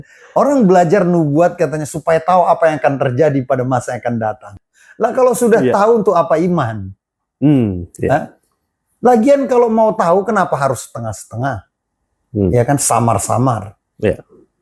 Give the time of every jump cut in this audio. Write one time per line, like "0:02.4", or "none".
0:04.5

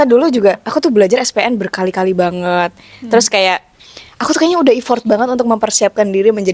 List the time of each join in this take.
none

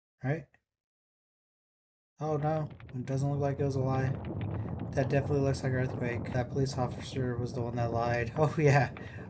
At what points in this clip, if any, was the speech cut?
0:06.3

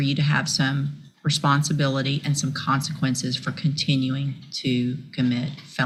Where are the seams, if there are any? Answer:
none

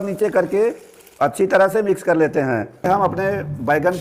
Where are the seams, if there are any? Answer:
0:02.9

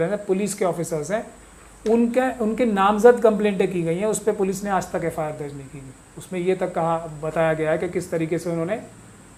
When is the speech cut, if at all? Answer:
none

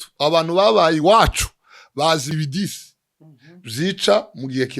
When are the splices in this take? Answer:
0:02.3

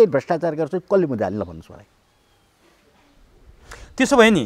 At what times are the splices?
none

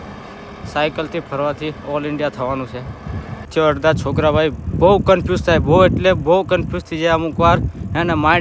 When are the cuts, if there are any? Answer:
0:03.5

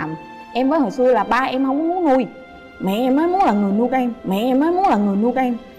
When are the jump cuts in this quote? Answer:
none

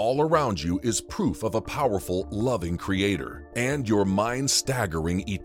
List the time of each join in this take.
none

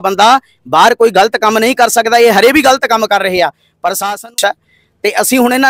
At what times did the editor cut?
0:04.2

